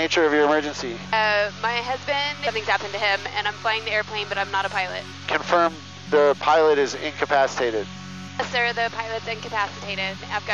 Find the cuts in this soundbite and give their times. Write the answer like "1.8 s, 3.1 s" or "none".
0.9 s, 2.4 s, 5.3 s